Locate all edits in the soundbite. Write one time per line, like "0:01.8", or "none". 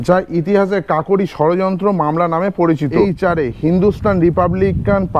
0:03.1